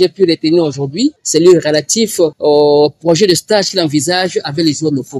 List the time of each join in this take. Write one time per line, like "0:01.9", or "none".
0:01.2
0:02.4

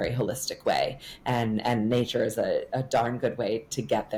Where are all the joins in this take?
none

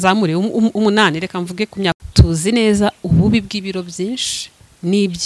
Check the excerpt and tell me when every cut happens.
0:02.0

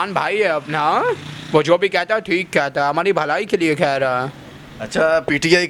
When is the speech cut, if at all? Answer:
none

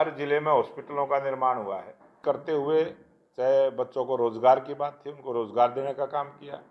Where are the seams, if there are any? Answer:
0:02.2

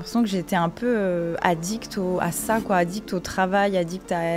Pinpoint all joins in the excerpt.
none

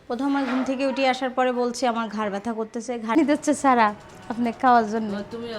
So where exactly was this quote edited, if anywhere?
0:03.1

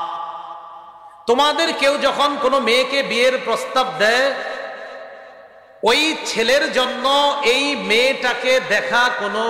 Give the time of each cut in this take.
none

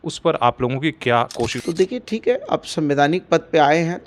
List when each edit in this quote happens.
0:01.6

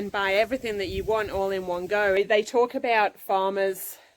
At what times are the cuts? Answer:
0:02.1

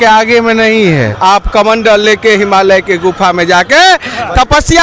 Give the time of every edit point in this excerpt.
0:01.1

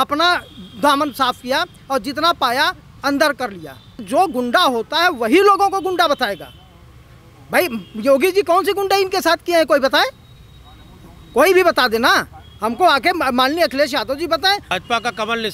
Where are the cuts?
0:04.0
0:14.7

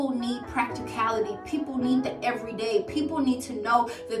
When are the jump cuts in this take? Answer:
none

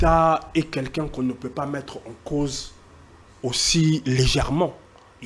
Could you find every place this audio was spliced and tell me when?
none

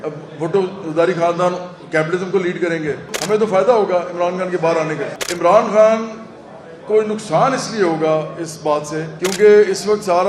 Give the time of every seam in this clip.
0:03.1
0:05.2
0:09.1

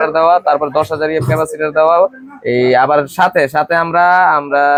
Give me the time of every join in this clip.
none

